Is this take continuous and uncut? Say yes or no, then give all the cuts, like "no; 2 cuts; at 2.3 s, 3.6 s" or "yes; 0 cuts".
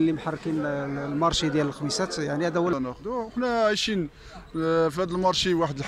no; 1 cut; at 2.7 s